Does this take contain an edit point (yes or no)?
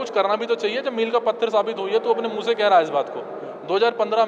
no